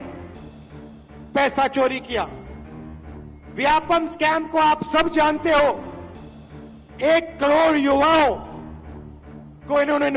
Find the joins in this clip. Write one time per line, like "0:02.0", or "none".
none